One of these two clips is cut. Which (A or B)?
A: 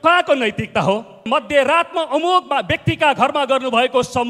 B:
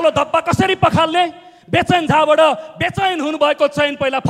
A